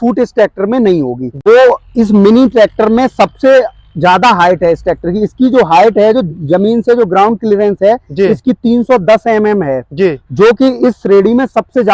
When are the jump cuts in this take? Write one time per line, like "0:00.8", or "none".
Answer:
0:01.3